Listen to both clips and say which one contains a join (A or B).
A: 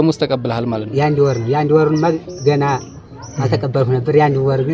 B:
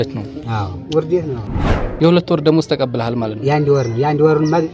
B